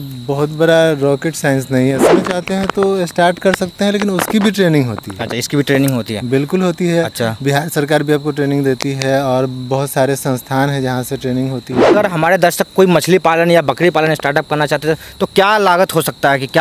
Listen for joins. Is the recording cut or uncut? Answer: cut